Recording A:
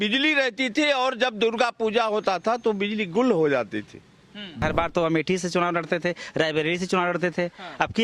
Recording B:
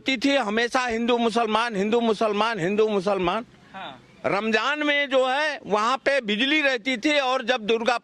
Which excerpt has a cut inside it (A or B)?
A